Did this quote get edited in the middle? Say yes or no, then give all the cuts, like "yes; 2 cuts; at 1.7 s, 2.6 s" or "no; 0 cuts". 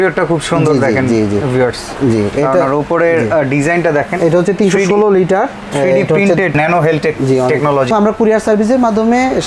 yes; 2 cuts; at 6.5 s, 7.9 s